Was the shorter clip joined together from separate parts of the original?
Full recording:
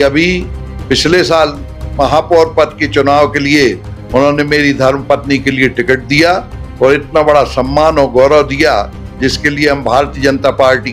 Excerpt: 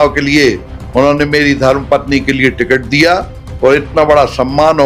no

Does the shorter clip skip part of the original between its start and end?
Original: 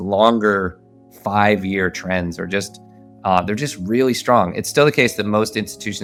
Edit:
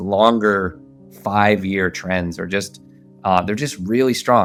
no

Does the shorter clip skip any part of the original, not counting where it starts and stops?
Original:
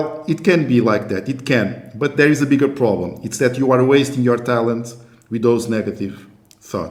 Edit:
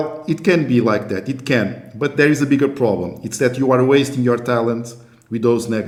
no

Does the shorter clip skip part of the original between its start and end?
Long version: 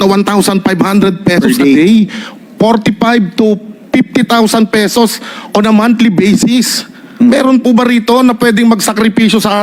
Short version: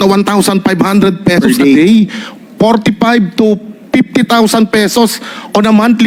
no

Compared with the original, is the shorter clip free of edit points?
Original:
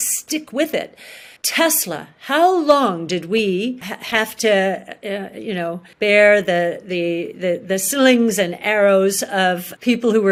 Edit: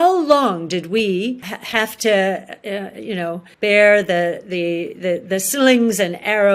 yes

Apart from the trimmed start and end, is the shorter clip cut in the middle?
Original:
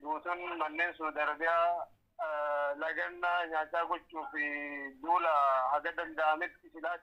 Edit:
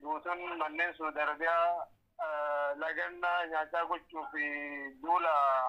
no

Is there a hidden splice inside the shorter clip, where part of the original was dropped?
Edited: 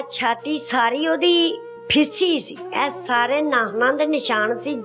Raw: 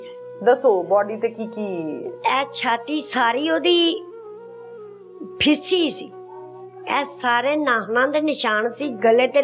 yes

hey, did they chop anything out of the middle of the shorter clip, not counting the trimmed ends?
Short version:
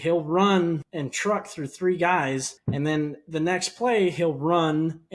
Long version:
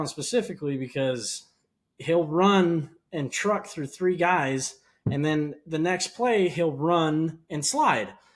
yes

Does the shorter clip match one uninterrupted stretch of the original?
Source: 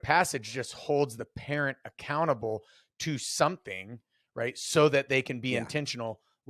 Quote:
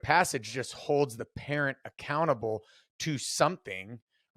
yes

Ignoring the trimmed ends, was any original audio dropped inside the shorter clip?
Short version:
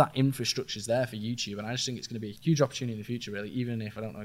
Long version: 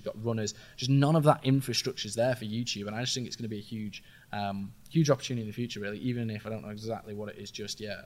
yes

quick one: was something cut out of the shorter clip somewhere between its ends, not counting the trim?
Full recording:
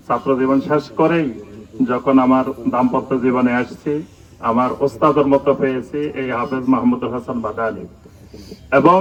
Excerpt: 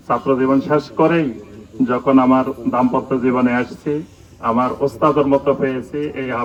no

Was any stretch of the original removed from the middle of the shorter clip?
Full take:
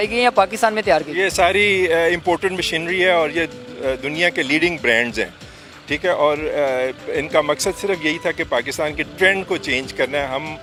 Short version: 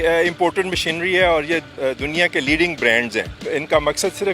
yes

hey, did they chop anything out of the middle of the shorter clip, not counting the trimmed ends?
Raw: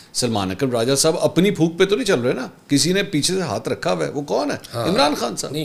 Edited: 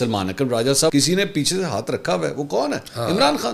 yes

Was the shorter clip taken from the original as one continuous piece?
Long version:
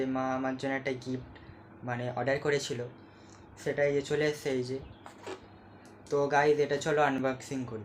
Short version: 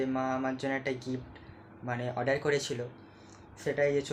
yes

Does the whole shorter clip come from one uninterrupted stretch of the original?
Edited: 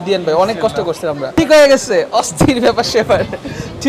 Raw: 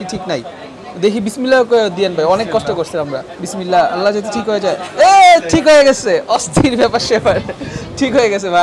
no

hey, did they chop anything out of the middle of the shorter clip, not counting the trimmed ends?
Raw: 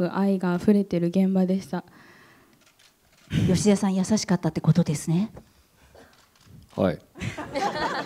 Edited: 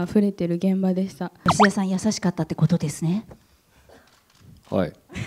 yes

